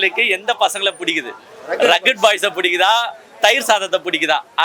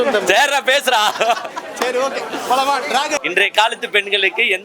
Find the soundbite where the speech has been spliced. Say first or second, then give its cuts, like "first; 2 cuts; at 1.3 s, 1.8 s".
second; 1 cut; at 3.2 s